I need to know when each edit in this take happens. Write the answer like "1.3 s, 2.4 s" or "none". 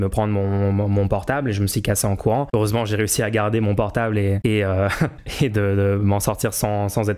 2.5 s, 4.4 s, 5.2 s